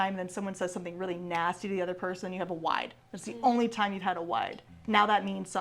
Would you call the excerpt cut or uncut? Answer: cut